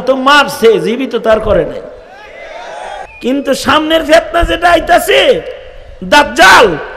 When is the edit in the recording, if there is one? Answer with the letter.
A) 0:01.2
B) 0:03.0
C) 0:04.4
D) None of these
B